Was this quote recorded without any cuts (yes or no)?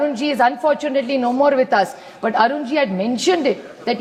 yes